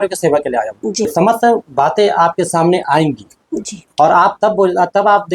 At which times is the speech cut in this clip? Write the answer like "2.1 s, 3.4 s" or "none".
1.1 s

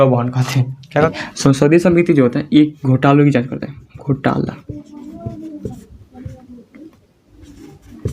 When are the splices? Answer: 1.1 s

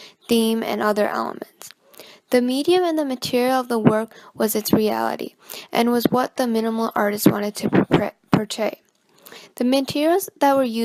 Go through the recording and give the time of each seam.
none

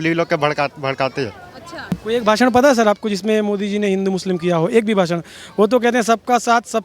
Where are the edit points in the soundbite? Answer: 1.9 s

